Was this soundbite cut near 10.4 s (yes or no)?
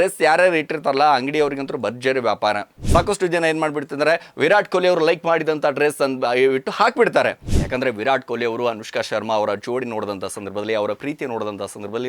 no